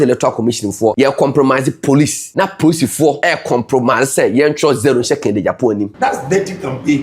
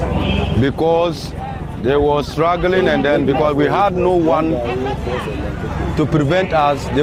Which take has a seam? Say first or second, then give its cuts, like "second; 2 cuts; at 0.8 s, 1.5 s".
first; 4 cuts; at 0.9 s, 2.2 s, 3.2 s, 5.9 s